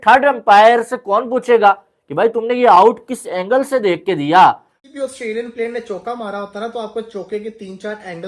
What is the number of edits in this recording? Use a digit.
1